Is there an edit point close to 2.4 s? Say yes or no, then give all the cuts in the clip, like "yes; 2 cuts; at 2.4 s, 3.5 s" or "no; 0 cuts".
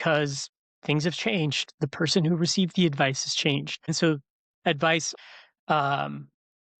no; 2 cuts; at 3.9 s, 5.1 s